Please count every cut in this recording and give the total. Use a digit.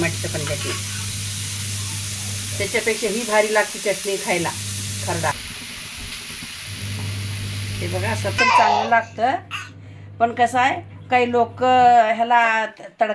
1